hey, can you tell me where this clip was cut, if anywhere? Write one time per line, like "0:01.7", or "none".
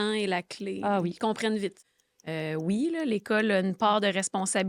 0:01.9